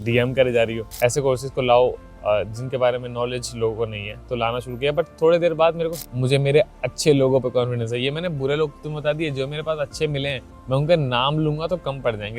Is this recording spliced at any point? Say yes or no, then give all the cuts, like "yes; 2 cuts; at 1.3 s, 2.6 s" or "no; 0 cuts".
yes; 3 cuts; at 0.9 s, 6.0 s, 10.5 s